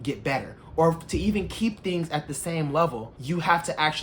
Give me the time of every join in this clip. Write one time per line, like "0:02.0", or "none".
0:03.1